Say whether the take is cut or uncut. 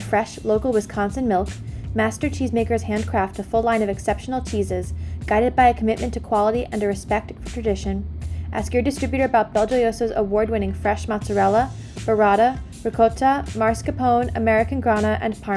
uncut